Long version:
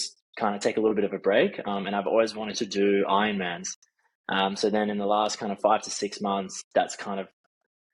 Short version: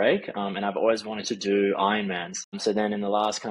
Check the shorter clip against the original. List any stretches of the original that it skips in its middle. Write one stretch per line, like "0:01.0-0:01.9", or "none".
0:03.9-0:04.5